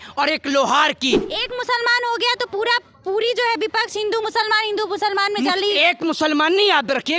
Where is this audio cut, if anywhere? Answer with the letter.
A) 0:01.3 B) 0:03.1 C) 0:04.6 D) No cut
A